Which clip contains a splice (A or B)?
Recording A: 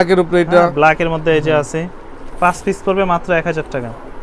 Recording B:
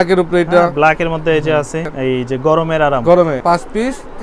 B